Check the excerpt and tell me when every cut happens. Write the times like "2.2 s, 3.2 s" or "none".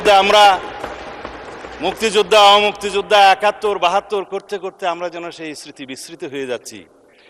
none